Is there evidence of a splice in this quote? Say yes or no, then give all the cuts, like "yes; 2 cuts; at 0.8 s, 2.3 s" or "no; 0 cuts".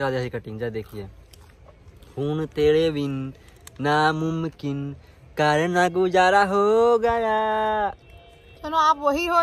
no; 0 cuts